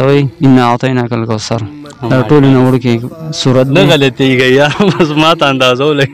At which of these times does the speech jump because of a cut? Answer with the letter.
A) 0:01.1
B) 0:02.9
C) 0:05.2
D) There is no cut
D